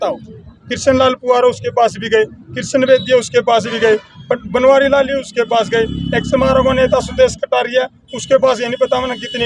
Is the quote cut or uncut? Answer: uncut